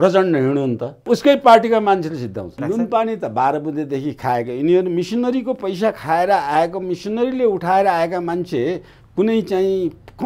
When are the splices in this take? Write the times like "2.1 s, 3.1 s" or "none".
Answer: 1.0 s, 2.5 s

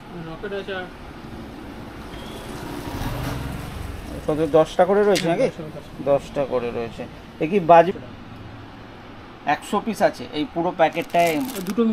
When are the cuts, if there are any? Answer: 7.9 s

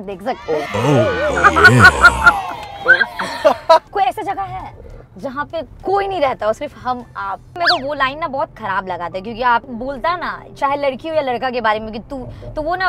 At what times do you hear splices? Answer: 3.9 s, 7.5 s, 9.7 s

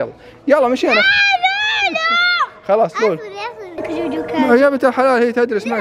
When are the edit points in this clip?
3.8 s

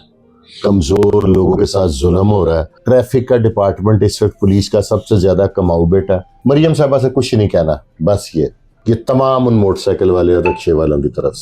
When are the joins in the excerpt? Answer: 2.8 s, 6.3 s, 8.7 s

